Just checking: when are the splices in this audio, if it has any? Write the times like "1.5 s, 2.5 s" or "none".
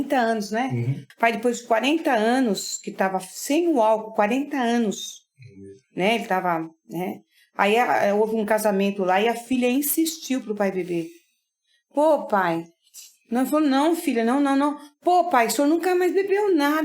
1.0 s